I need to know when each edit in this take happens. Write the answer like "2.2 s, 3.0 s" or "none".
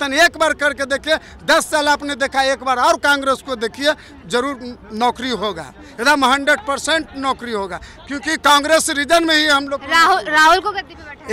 none